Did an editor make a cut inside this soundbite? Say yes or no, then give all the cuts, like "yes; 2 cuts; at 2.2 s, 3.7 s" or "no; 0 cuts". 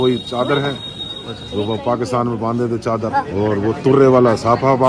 no; 0 cuts